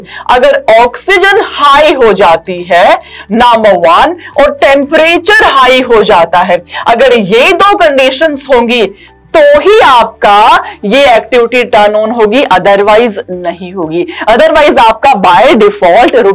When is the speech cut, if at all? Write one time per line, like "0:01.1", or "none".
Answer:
none